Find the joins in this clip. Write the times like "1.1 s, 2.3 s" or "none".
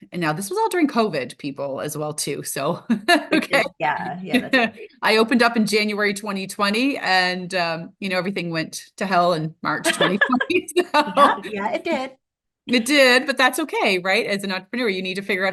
none